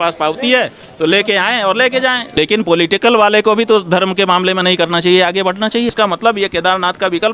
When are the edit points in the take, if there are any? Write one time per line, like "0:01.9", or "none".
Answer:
0:02.2
0:05.9